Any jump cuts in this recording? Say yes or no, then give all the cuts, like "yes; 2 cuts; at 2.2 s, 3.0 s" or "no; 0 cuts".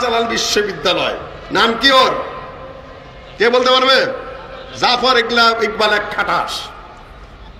no; 0 cuts